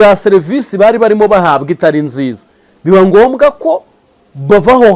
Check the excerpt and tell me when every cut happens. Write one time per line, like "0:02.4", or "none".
none